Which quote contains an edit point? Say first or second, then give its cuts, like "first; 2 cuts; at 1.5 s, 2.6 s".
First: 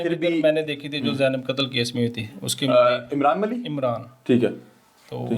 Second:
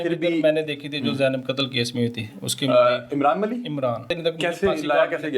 second; 1 cut; at 4.1 s